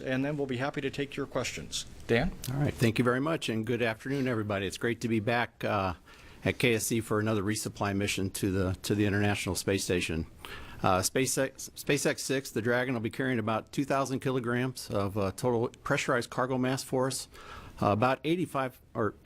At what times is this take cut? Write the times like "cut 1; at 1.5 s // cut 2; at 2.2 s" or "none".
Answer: cut 1; at 5.0 s